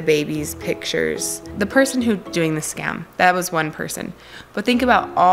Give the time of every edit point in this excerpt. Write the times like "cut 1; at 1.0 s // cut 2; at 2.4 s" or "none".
cut 1; at 1.5 s // cut 2; at 2.3 s